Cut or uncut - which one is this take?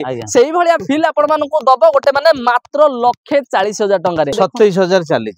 cut